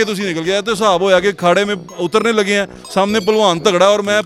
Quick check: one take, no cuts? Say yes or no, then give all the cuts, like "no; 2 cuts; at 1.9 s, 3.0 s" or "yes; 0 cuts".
yes; 0 cuts